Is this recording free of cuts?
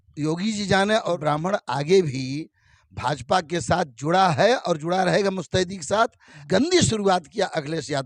no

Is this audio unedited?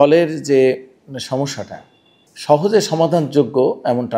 yes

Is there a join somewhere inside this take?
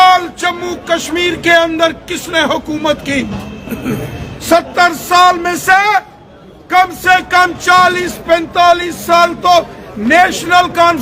no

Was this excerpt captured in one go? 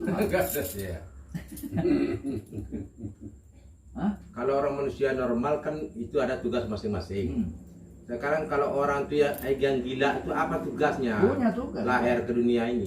no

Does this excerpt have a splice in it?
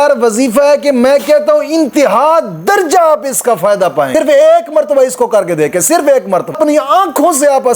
yes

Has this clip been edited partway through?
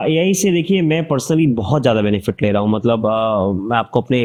no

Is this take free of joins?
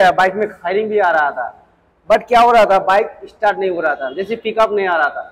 yes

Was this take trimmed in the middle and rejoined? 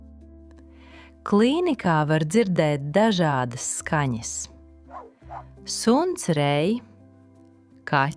yes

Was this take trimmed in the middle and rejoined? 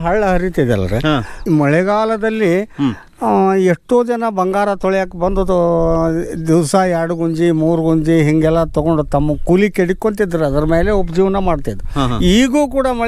no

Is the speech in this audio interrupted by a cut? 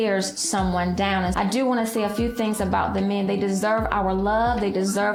no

